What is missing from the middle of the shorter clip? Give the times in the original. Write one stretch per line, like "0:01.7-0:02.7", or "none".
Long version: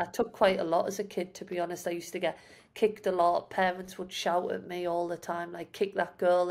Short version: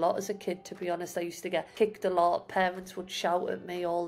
0:02.4-0:02.7